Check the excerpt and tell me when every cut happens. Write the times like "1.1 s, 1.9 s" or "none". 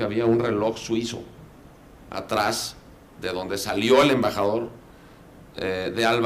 3.6 s